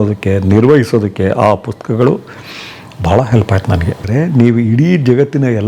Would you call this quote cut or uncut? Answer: cut